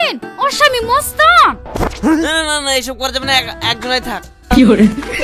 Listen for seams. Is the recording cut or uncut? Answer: uncut